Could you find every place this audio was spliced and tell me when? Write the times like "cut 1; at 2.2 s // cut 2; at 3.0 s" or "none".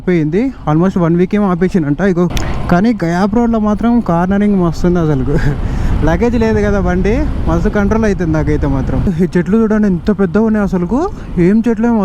cut 1; at 2.3 s // cut 2; at 9.0 s